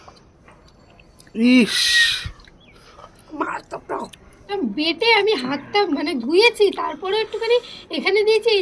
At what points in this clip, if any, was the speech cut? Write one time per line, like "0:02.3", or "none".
0:04.5